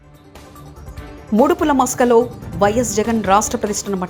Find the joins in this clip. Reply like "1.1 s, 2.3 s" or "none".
none